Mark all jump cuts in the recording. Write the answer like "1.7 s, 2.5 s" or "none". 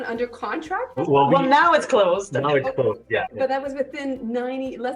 1.0 s, 3.3 s